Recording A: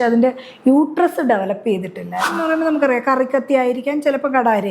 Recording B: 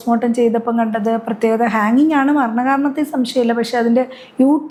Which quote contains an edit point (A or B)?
A